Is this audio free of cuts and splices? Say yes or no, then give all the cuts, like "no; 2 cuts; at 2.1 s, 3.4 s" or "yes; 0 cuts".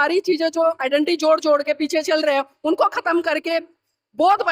yes; 0 cuts